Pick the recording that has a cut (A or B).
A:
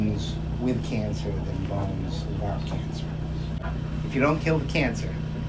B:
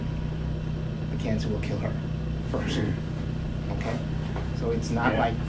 A